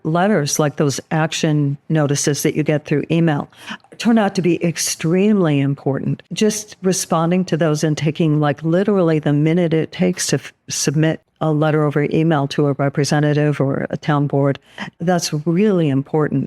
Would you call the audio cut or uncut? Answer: cut